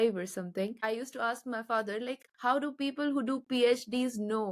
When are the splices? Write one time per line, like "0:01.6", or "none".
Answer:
0:00.8
0:02.3